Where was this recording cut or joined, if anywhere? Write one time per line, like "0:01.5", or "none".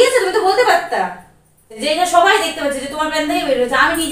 0:01.8

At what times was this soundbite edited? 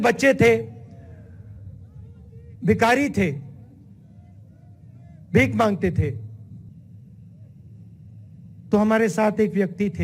0:06.7

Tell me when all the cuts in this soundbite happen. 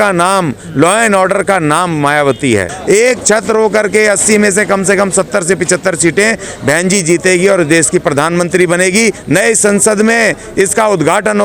0:02.7
0:09.2

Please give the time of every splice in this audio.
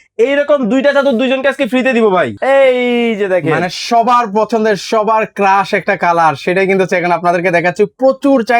0:02.3

